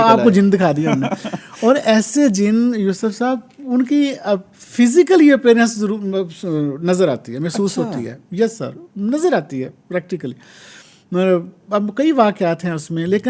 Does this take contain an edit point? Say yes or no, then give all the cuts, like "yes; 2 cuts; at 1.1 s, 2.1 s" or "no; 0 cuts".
no; 0 cuts